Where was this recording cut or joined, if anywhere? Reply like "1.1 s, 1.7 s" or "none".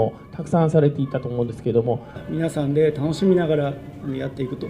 2.2 s